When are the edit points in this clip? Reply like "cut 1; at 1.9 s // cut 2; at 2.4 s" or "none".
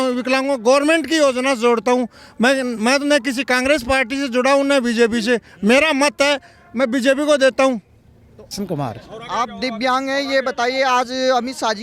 cut 1; at 8.4 s